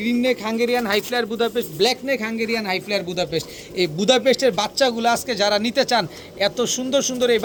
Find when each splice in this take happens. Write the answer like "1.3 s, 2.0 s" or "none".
none